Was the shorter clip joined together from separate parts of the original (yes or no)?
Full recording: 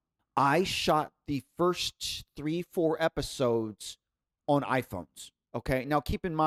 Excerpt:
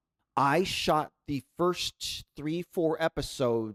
no